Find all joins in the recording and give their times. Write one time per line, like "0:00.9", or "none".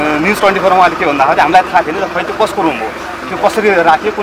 none